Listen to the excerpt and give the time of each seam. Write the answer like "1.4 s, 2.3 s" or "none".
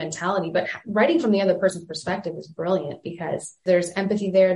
3.6 s